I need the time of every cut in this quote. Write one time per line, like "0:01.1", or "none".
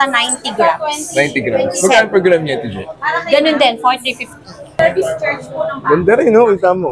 0:04.8